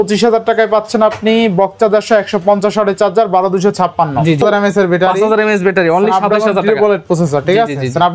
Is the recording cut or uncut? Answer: cut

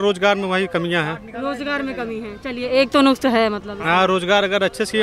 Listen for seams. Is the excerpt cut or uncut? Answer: uncut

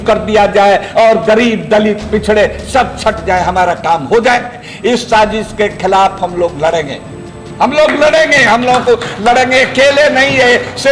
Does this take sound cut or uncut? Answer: cut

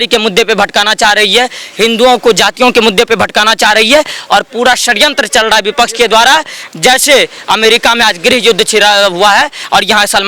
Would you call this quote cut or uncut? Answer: uncut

